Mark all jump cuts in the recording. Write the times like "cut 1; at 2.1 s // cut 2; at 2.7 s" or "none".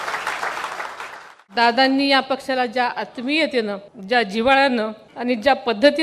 cut 1; at 1.2 s // cut 2; at 3.9 s // cut 3; at 5.0 s